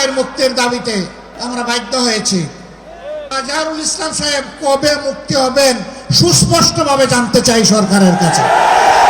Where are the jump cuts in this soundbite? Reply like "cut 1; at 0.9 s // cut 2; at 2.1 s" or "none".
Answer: cut 1; at 1.3 s // cut 2; at 3.3 s